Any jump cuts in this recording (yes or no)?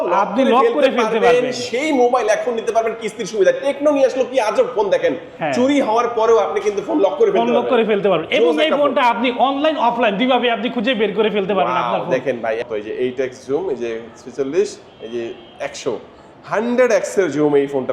yes